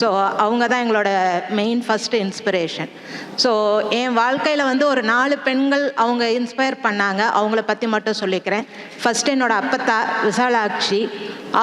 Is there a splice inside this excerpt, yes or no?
no